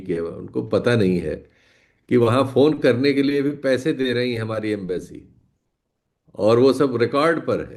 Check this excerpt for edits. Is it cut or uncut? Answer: uncut